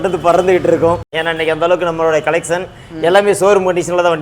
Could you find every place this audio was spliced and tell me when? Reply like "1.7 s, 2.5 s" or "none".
1.2 s